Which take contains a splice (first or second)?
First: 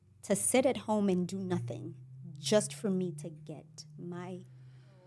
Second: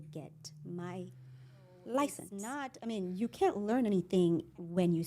second